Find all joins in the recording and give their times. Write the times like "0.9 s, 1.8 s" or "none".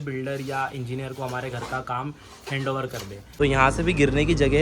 3.2 s